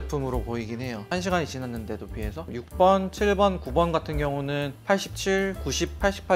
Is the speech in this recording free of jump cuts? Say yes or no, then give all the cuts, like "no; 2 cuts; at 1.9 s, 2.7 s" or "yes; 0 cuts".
no; 2 cuts; at 1.1 s, 2.5 s